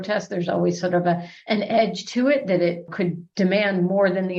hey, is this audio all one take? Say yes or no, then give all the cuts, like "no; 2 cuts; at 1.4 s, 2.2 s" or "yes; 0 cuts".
yes; 0 cuts